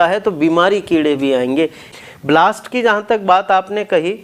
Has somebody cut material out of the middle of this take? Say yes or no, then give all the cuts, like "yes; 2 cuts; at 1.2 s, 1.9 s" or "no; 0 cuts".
yes; 1 cut; at 1.9 s